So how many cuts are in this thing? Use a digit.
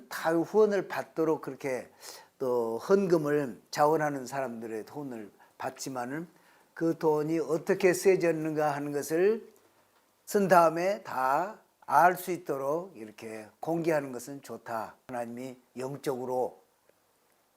1